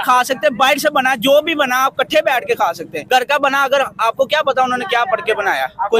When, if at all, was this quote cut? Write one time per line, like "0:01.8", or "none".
0:02.9